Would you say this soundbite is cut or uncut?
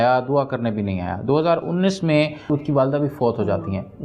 cut